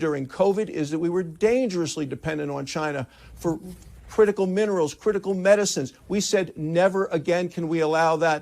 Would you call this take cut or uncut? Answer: uncut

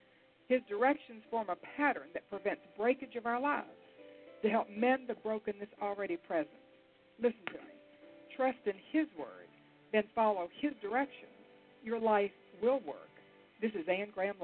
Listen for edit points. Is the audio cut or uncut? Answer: uncut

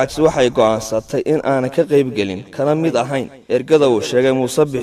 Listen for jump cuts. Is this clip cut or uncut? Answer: cut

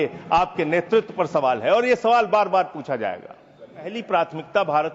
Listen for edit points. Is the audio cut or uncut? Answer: cut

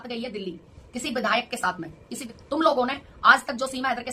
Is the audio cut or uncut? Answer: cut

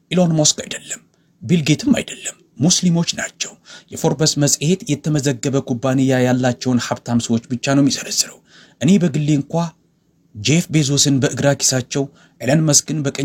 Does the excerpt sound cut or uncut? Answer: uncut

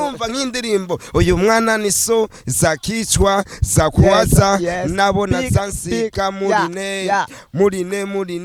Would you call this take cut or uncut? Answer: uncut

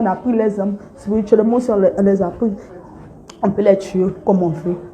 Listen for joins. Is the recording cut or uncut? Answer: cut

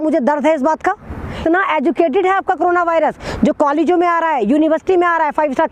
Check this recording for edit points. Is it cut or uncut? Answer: cut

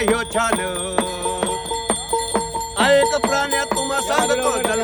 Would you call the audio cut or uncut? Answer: uncut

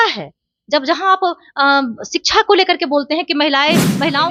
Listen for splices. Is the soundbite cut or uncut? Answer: uncut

